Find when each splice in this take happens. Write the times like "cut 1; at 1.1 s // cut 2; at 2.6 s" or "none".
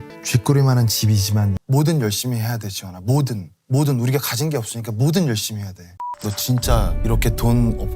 cut 1; at 6.0 s